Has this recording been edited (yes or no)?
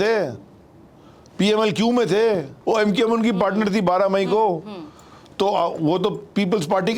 yes